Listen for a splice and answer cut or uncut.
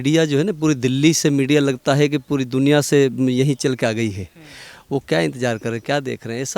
uncut